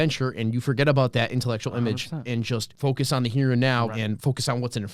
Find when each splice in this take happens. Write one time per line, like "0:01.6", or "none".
0:02.7
0:03.9